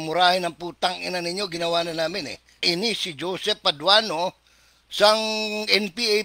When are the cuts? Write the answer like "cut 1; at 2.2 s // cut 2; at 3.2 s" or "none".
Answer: cut 1; at 2.6 s